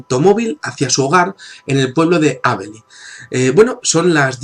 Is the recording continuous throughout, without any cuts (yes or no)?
yes